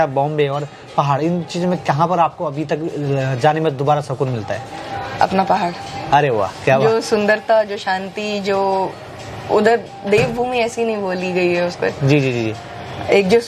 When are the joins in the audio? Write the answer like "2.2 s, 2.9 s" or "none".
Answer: none